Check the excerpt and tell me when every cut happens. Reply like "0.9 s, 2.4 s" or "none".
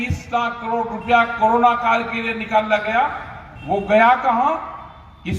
none